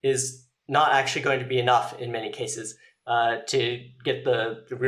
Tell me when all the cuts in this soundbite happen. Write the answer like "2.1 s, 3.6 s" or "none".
none